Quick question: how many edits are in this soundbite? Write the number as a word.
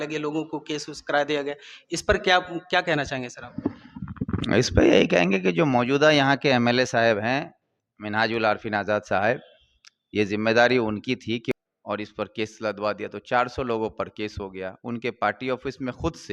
one